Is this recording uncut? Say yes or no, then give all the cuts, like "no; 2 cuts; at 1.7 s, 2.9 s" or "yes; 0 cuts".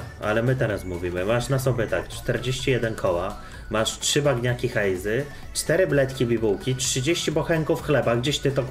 yes; 0 cuts